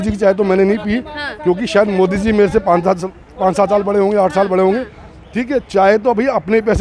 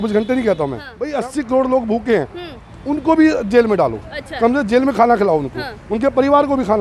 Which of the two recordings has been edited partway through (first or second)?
second